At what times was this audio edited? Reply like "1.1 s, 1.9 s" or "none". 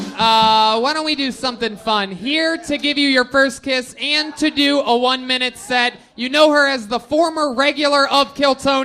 none